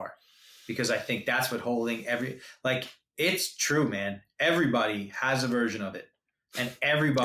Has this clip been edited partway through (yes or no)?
no